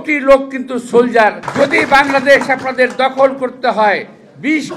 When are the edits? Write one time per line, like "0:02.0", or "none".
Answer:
0:01.4